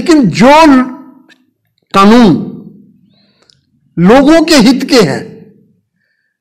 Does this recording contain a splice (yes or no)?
no